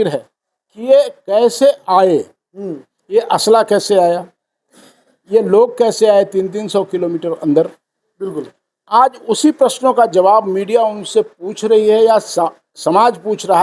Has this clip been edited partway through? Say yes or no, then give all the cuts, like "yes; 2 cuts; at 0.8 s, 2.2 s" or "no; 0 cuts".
no; 0 cuts